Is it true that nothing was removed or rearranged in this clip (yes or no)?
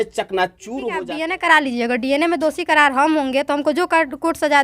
no